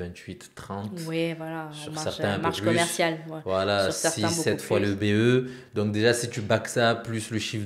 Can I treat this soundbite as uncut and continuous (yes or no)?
yes